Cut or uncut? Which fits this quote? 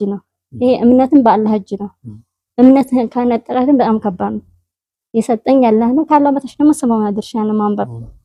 uncut